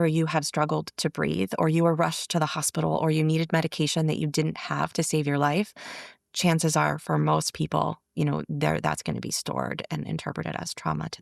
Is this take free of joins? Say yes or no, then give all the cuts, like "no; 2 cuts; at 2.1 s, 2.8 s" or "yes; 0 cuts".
yes; 0 cuts